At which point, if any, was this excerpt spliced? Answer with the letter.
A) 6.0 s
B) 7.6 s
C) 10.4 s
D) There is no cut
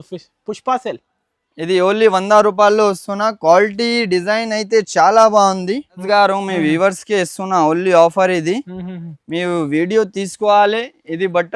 A